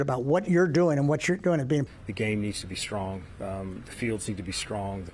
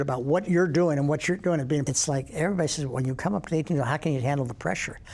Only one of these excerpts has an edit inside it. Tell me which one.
first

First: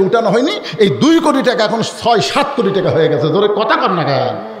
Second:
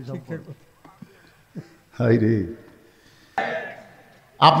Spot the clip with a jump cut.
second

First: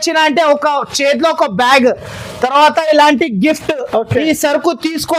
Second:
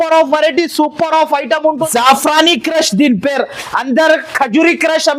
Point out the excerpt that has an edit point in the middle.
second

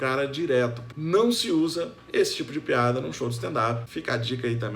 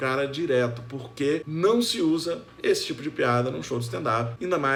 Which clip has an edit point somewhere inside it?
first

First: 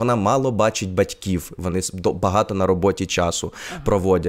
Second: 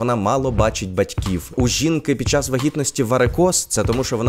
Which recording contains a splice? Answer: second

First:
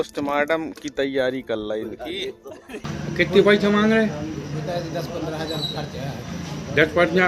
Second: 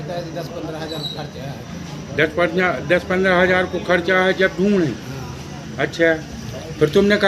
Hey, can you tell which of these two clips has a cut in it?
first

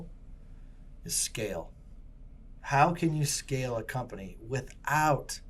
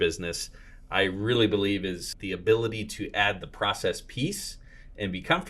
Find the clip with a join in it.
second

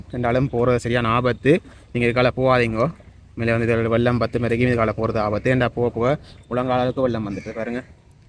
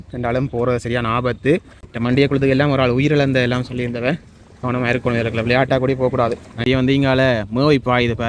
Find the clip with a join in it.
second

